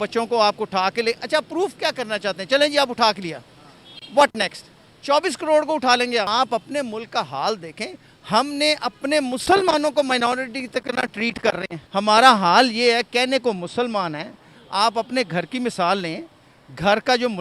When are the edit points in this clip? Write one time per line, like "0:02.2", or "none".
0:06.3
0:11.8